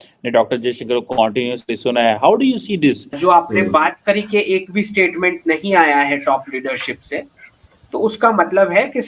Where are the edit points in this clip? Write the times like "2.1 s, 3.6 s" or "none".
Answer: 3.2 s